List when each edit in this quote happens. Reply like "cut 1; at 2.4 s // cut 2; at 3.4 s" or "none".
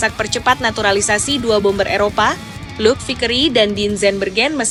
none